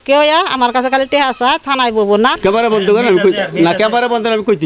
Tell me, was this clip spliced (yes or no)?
yes